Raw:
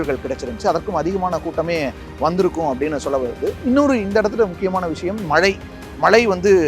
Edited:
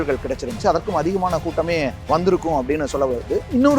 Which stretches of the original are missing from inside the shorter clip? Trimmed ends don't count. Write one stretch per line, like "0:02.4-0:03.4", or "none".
0:02.0-0:02.1